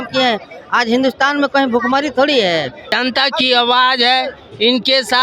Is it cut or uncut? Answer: cut